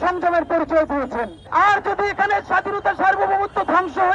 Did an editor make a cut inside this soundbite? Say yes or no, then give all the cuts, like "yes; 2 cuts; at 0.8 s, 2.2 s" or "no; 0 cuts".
yes; 1 cut; at 1.4 s